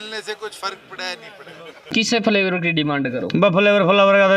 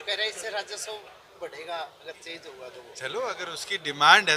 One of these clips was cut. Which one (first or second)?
first